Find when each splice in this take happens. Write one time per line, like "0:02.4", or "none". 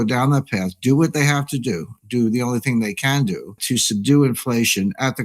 0:03.6

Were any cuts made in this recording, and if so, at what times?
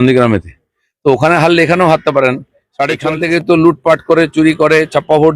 0:03.0

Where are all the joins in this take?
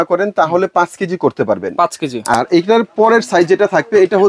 0:02.3

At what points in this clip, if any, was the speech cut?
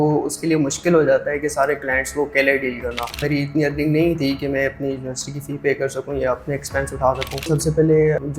0:03.2
0:07.4

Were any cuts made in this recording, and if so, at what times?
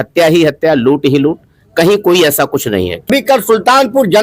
0:03.1

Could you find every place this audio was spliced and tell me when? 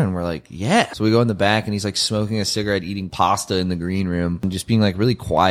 0:00.9
0:03.1
0:04.5

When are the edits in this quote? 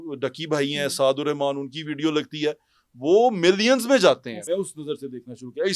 0:04.3

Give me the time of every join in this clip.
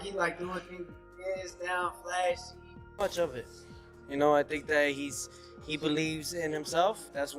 0:03.0

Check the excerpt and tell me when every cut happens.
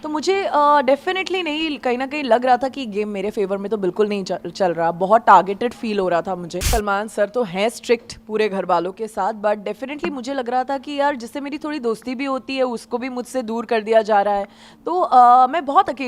0:06.7

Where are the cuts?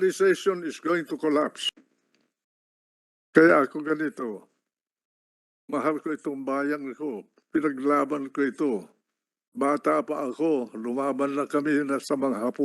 0:01.7

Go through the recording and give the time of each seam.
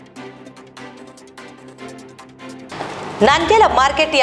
0:02.6

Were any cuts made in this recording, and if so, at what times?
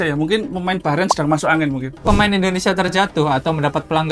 0:02.0

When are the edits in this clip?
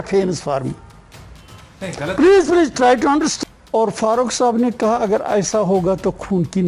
0:03.3

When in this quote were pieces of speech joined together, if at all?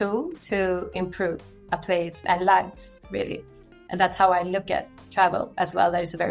0:02.3

